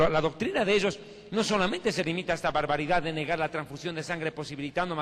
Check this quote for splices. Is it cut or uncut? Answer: uncut